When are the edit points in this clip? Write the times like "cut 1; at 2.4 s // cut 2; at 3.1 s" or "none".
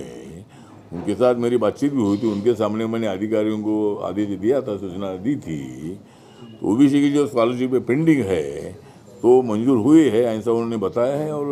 none